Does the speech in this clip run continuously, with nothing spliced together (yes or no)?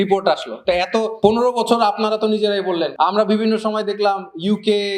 no